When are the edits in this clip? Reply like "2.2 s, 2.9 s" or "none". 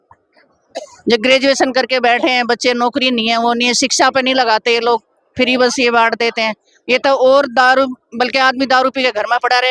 none